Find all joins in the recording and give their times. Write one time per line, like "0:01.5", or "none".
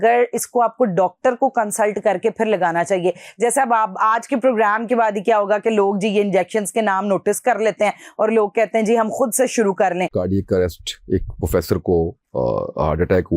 0:10.1